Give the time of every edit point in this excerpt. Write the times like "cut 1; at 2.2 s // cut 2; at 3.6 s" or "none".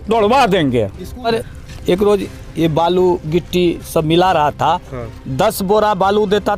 cut 1; at 1.3 s